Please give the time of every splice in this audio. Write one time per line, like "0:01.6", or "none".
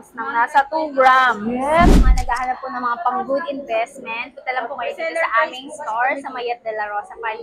0:01.9

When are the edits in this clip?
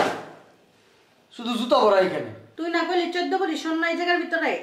0:02.4

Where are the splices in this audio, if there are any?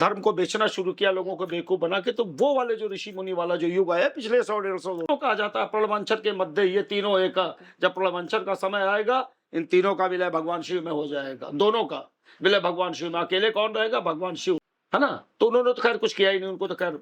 0:05.1
0:14.7

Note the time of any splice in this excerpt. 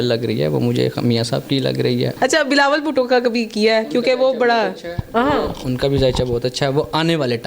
0:02.1

